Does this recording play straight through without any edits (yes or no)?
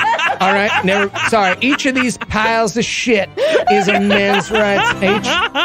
yes